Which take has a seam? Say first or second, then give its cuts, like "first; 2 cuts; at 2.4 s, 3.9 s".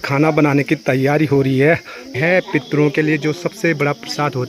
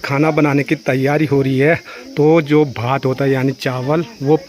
first; 1 cut; at 2.1 s